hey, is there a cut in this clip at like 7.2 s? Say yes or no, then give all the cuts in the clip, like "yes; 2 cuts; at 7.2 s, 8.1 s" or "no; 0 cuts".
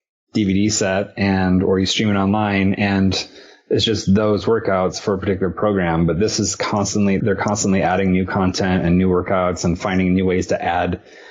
yes; 1 cut; at 7.2 s